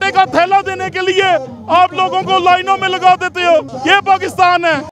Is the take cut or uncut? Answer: cut